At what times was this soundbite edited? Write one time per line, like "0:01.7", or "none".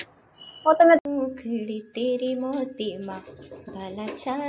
0:01.0